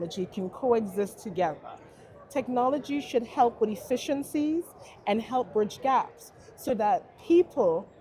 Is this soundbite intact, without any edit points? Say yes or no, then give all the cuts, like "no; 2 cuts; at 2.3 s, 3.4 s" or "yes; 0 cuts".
yes; 0 cuts